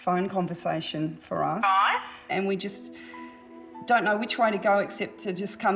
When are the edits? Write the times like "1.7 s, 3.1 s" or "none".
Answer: none